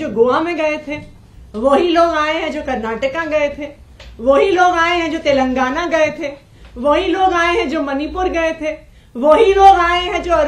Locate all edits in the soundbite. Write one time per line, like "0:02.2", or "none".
none